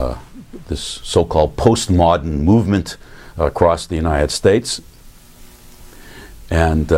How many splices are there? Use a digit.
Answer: 0